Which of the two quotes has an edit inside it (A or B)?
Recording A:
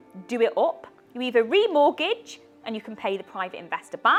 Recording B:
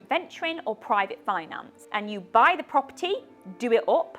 B